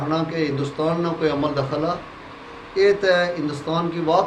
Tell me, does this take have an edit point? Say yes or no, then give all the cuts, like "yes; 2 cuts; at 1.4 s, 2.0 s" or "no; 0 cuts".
no; 0 cuts